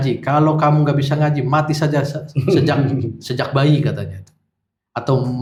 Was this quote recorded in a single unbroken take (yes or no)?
yes